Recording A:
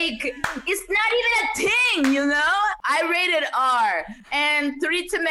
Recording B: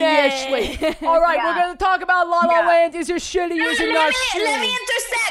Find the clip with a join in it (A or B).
A